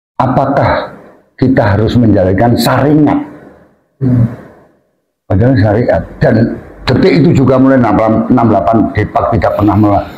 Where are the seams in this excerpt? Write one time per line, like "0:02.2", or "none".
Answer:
none